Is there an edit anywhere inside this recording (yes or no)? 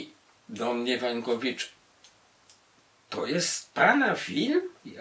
no